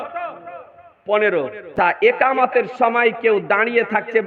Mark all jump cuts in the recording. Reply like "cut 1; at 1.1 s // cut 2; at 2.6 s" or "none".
cut 1; at 1.7 s